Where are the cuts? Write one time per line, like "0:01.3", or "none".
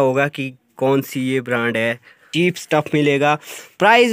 0:02.4